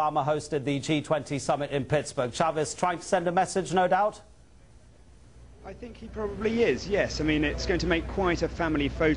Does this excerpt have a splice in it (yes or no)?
no